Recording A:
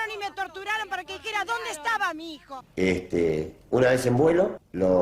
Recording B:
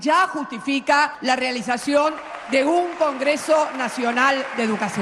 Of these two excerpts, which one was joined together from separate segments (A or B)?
A